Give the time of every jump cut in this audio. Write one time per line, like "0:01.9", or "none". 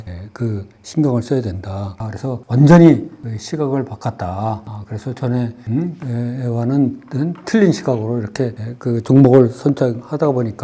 0:02.0